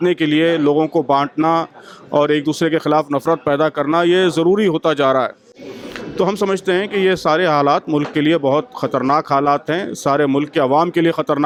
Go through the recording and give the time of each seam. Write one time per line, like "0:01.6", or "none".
none